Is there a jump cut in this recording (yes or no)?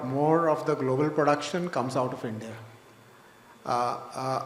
no